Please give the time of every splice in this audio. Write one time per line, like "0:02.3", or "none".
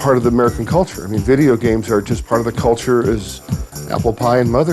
0:02.2